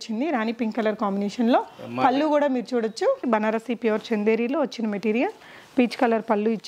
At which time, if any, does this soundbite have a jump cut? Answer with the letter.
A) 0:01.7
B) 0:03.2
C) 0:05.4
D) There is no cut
B